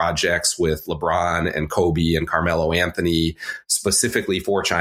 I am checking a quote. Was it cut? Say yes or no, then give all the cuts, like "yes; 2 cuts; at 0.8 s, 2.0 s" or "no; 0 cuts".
no; 0 cuts